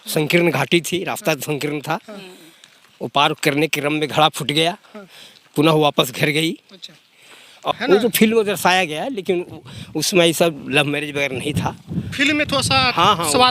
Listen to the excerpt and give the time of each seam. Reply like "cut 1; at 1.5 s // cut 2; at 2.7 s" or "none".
cut 1; at 7.7 s